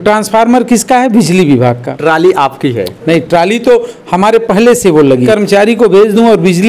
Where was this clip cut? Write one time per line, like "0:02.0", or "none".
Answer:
0:01.9
0:05.3